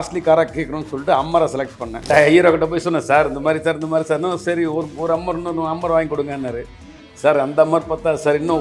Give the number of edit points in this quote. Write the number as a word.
one